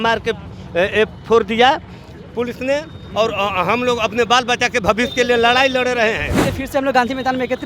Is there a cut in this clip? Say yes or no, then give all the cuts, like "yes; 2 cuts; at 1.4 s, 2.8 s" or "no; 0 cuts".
yes; 1 cut; at 6.3 s